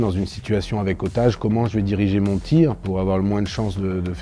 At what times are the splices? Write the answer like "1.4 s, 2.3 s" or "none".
none